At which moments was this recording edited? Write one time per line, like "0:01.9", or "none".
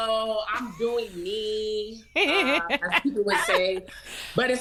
none